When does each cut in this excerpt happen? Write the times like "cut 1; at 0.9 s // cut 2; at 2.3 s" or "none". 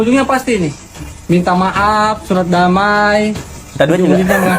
none